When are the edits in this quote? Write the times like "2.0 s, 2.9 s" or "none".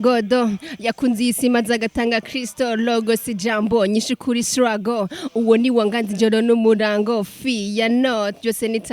none